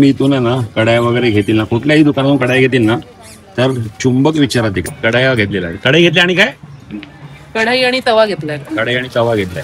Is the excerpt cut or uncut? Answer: cut